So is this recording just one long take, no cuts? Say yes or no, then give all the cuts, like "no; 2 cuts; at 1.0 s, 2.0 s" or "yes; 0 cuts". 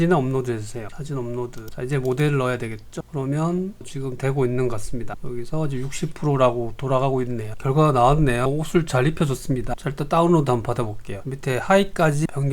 yes; 0 cuts